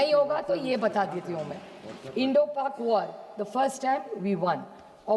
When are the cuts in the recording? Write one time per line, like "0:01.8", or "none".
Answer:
none